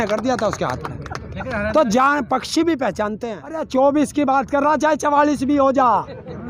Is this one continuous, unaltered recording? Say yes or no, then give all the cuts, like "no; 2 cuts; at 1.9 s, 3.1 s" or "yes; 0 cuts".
no; 1 cut; at 3.7 s